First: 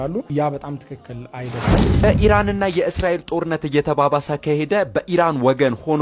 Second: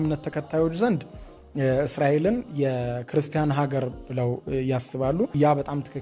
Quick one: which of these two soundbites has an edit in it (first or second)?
first